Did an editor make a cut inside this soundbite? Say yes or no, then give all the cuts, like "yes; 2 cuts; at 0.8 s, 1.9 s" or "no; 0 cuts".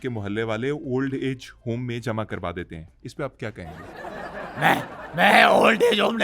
no; 0 cuts